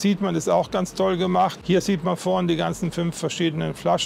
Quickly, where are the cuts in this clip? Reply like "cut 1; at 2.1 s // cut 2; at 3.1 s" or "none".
none